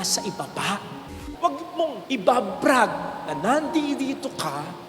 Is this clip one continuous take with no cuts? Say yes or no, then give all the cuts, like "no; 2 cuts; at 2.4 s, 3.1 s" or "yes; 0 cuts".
no; 1 cut; at 1.3 s